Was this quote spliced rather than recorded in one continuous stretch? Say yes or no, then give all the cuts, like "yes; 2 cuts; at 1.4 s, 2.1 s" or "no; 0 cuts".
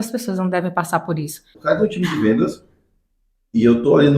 yes; 1 cut; at 1.5 s